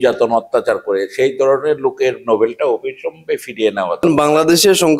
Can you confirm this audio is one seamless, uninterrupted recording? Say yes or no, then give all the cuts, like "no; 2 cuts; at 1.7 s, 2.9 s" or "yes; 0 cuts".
no; 1 cut; at 4.0 s